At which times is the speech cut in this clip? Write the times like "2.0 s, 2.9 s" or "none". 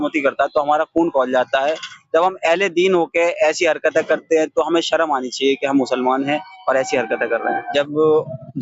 7.6 s